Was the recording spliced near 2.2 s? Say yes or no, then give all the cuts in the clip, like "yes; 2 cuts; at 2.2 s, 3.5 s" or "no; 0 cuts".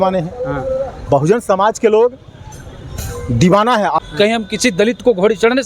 no; 1 cut; at 4.0 s